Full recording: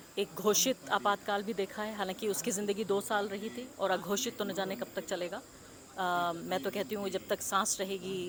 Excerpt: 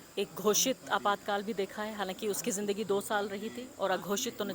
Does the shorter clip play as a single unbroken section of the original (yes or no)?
yes